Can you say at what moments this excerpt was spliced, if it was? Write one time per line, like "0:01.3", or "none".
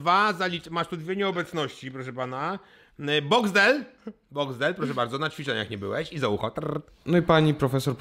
0:06.9